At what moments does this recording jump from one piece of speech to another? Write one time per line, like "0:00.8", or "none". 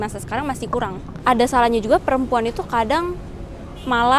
0:01.1